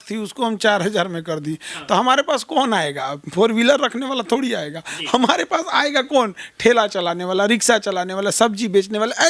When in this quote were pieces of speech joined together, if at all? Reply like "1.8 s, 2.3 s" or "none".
none